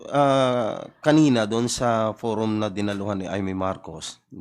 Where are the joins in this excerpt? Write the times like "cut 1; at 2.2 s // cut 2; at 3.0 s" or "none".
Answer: none